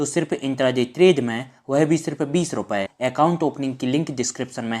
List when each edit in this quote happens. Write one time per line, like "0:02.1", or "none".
0:02.9